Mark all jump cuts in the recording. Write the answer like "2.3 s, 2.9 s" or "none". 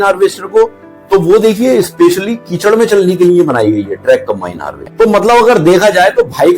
4.8 s